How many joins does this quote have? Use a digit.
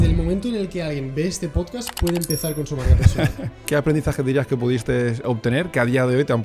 1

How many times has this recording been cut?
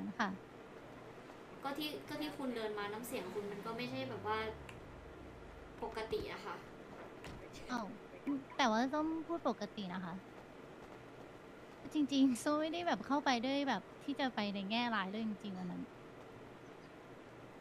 1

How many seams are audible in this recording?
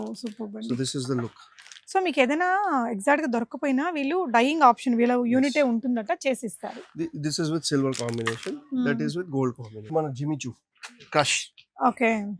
1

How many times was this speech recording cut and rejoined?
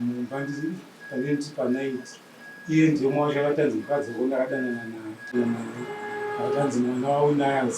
1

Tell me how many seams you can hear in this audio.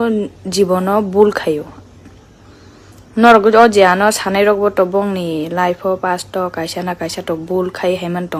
0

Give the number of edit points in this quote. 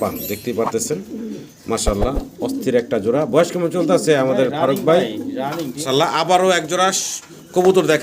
1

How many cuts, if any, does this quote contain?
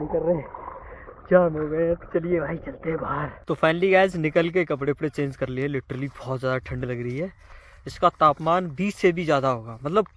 0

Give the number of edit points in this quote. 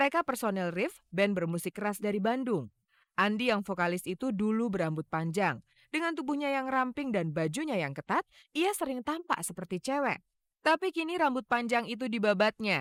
0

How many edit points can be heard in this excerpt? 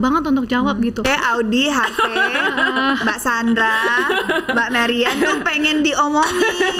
1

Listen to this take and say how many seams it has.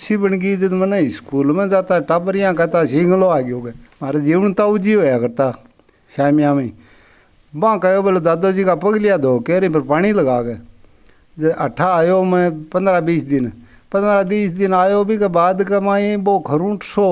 0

